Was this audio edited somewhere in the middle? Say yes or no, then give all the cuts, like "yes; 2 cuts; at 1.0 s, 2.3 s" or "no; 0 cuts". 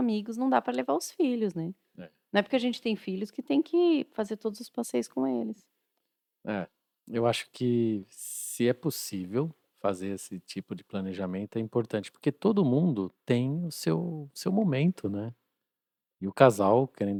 no; 0 cuts